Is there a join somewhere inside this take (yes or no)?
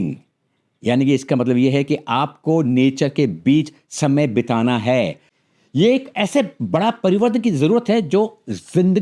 yes